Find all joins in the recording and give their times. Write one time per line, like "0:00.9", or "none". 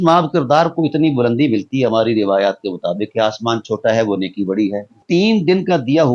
0:05.0